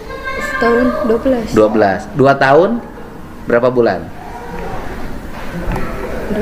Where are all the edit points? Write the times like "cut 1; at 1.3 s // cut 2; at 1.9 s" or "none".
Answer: none